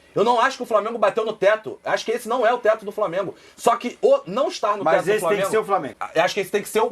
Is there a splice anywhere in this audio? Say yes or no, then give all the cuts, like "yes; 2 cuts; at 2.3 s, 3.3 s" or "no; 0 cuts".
yes; 1 cut; at 6.0 s